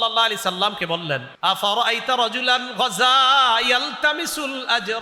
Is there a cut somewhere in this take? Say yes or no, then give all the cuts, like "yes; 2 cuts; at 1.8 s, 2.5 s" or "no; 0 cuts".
yes; 1 cut; at 1.3 s